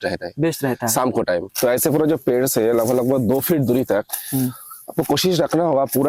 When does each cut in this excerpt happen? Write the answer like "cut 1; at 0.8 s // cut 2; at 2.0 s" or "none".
cut 1; at 1.5 s